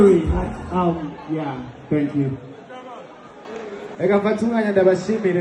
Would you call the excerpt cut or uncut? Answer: cut